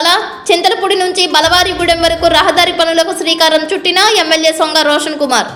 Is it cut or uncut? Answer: uncut